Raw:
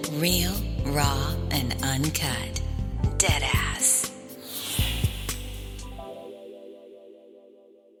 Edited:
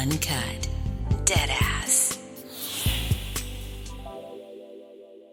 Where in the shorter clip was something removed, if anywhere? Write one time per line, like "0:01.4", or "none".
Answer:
none